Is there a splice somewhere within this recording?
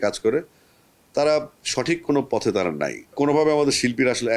yes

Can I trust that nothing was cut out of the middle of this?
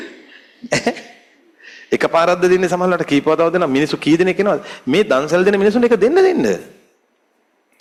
yes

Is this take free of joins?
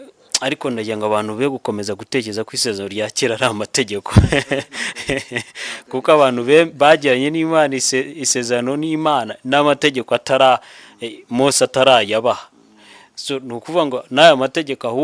yes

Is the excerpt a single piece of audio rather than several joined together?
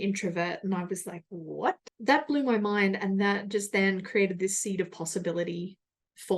no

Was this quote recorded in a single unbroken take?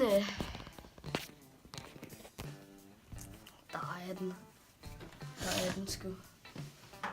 no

